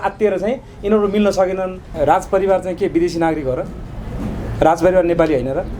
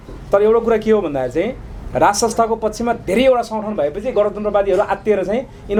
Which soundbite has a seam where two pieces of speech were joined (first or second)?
first